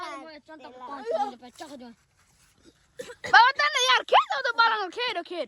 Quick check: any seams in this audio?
no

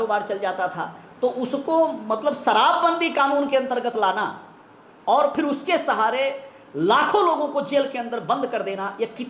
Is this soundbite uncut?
yes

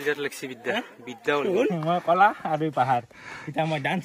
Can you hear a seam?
yes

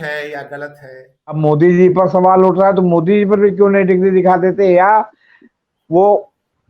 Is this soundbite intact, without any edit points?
no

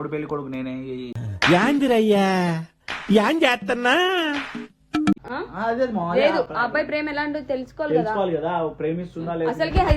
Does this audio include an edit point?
yes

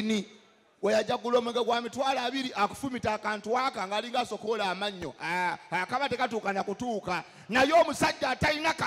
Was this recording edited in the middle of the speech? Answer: no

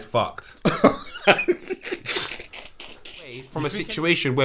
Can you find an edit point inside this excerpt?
yes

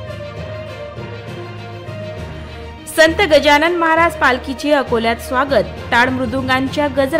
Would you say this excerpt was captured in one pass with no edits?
no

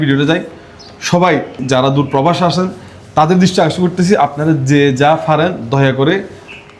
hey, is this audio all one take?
no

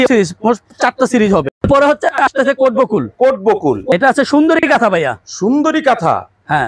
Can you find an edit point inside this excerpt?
yes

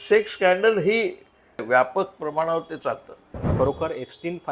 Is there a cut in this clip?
yes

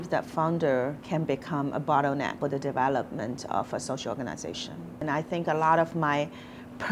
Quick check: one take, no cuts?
no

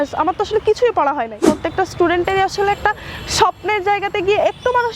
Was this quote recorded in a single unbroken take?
no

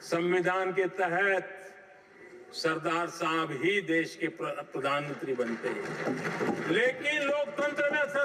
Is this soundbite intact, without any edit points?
yes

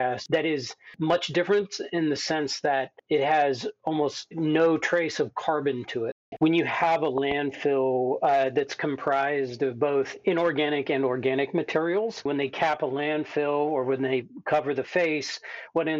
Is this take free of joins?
no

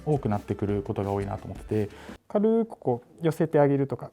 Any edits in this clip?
yes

